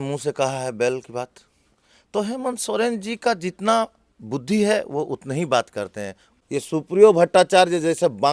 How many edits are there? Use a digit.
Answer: 1